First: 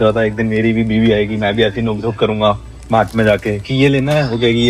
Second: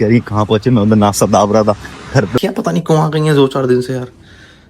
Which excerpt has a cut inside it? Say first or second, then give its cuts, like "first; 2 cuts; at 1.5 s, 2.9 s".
second; 1 cut; at 2.4 s